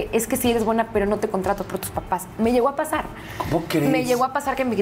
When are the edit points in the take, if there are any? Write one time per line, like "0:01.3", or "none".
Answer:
none